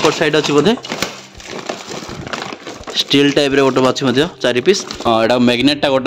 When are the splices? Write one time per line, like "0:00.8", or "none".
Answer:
0:05.1